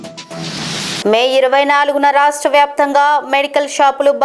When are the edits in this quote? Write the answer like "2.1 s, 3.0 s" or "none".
1.0 s